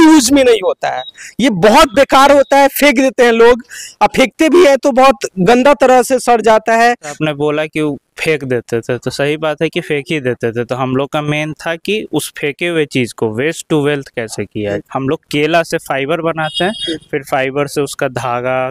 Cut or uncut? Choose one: cut